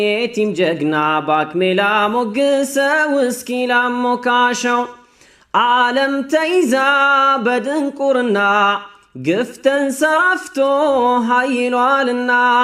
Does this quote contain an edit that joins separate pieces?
no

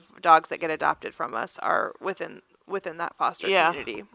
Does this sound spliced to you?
no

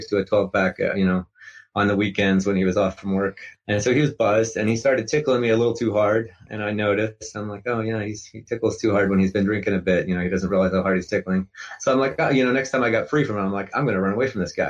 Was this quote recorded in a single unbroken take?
no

